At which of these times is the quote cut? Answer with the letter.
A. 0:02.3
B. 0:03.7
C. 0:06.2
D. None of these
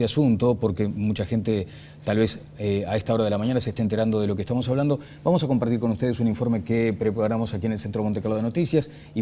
B